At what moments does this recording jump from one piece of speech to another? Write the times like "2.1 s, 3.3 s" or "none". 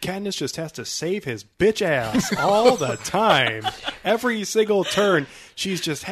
none